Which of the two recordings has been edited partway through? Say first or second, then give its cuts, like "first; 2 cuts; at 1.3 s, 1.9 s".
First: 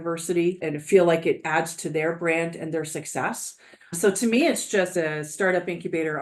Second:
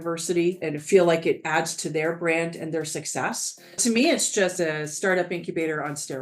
second; 1 cut; at 3.8 s